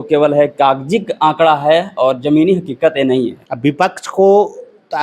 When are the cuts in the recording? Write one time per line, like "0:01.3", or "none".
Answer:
0:03.4